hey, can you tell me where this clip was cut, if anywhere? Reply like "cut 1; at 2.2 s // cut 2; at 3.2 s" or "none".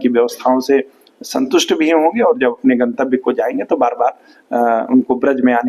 none